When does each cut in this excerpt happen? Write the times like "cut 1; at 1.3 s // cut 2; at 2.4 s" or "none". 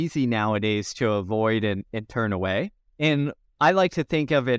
cut 1; at 3.4 s